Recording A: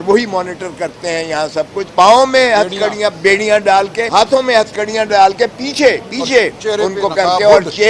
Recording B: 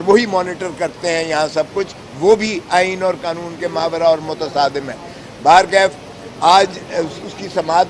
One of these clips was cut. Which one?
A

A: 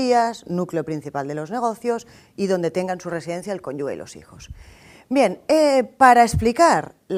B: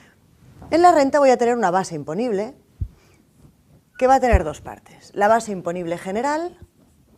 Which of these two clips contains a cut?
B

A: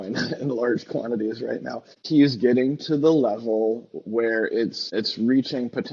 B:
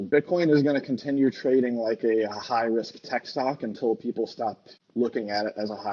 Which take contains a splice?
A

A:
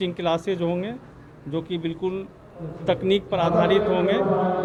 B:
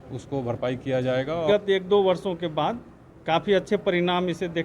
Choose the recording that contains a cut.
B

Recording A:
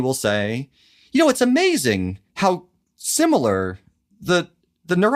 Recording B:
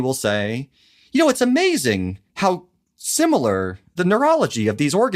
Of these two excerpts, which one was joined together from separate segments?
B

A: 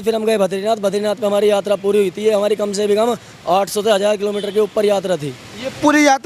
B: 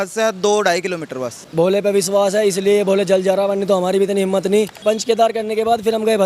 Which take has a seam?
B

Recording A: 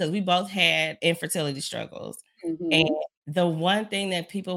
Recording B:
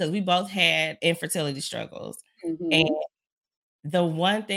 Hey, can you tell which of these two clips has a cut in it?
A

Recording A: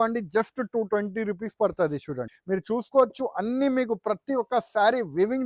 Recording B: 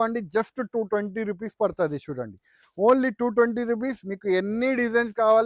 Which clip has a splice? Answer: A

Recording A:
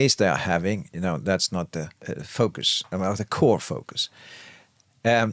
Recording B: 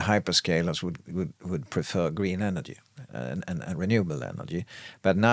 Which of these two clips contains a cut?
A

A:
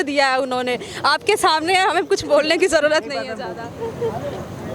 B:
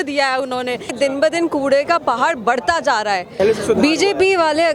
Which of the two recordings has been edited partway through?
B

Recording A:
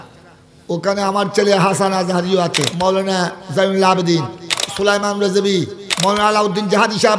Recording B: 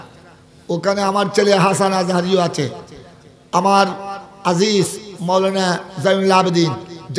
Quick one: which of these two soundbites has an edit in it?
A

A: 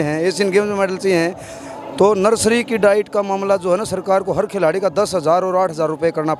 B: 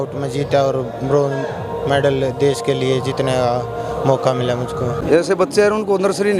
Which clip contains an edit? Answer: B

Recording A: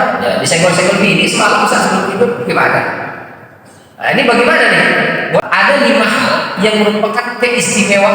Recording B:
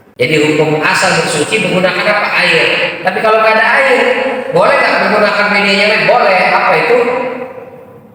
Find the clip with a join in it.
A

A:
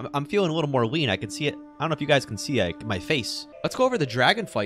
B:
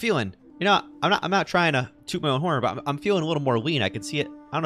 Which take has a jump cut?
A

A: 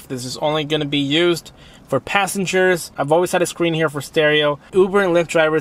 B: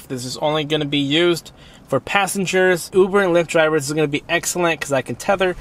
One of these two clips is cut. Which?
B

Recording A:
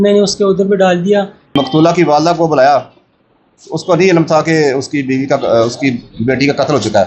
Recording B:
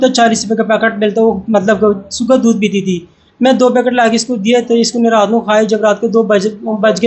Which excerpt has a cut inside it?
A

